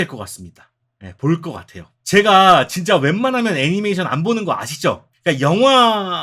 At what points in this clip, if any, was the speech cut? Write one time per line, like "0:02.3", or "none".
0:05.1